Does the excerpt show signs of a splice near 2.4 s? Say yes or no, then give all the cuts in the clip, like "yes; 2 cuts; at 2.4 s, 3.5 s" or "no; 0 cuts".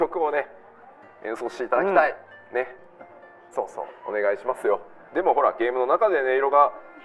no; 1 cut; at 5.0 s